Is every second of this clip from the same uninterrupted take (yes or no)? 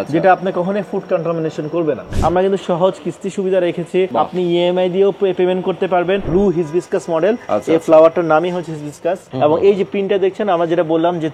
no